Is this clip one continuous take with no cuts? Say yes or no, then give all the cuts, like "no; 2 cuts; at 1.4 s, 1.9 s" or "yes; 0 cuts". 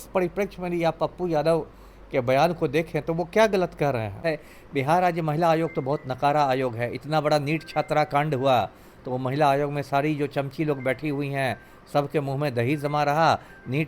no; 1 cut; at 4.2 s